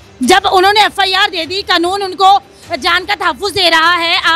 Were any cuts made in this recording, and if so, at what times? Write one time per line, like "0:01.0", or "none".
none